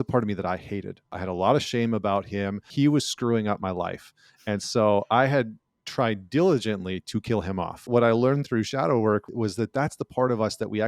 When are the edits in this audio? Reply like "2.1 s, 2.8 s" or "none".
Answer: 1.1 s, 2.7 s, 7.8 s, 9.3 s